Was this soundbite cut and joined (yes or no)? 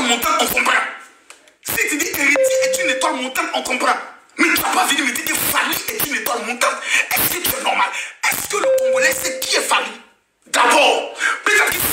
no